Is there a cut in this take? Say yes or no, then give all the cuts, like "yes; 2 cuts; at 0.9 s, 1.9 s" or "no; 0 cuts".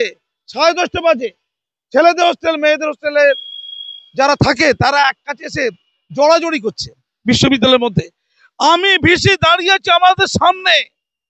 no; 0 cuts